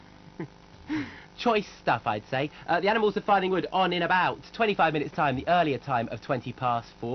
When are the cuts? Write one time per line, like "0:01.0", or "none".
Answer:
0:04.5